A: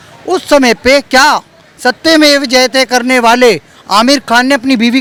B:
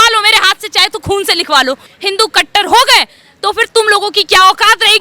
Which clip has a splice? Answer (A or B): B